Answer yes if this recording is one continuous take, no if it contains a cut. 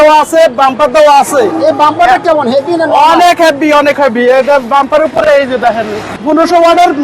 no